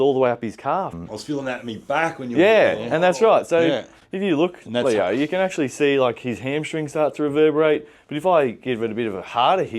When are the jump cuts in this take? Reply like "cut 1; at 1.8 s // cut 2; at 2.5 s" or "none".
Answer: cut 1; at 1.0 s